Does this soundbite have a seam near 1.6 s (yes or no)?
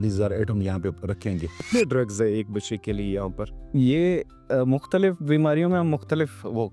yes